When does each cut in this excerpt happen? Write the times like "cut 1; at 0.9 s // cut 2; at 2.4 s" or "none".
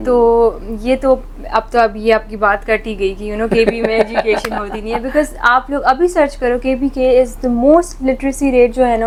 none